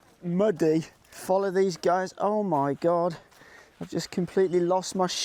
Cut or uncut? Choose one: uncut